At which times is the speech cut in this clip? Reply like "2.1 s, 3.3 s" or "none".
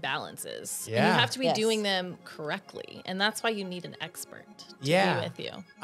none